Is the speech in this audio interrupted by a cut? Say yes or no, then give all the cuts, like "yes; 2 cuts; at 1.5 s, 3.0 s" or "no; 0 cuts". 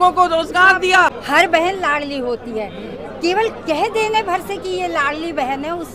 yes; 1 cut; at 1.2 s